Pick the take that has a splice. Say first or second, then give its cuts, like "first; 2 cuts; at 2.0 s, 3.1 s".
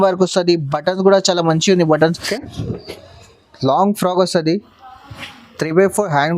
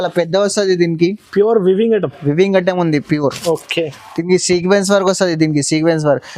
first; 1 cut; at 2.4 s